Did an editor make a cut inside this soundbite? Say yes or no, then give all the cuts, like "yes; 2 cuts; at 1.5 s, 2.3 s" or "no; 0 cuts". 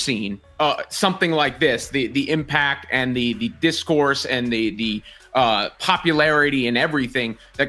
no; 0 cuts